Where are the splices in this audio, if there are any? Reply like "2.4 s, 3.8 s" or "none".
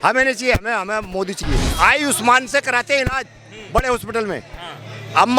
1.7 s